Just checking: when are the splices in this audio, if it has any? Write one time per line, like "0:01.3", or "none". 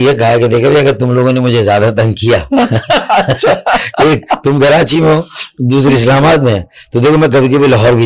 none